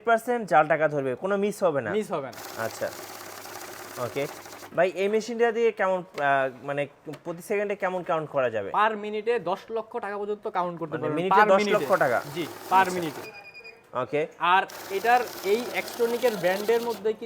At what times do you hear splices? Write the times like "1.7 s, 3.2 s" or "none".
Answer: none

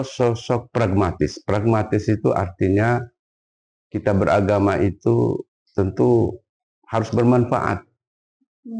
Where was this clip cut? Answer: none

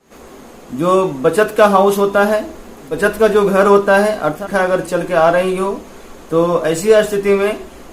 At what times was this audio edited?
4.5 s

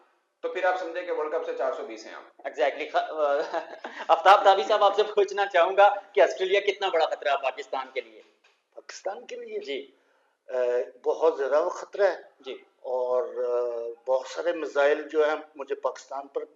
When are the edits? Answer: none

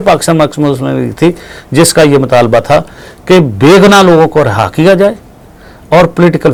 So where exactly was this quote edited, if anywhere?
none

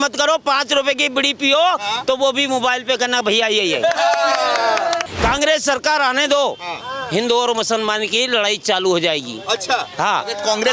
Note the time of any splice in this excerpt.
5.1 s

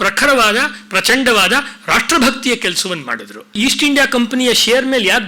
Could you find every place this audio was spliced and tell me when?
3.6 s

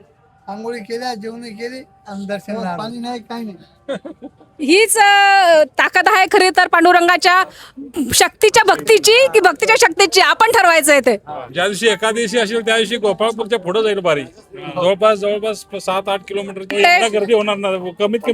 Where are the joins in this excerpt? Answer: 2.8 s, 11.5 s, 16.7 s

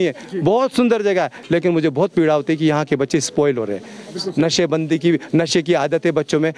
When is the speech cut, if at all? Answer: none

